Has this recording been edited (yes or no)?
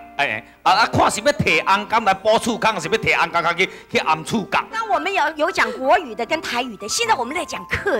yes